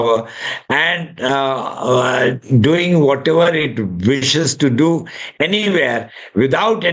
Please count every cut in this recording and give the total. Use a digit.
0